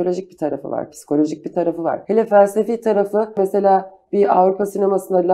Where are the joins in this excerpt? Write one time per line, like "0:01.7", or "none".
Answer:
0:02.0
0:03.4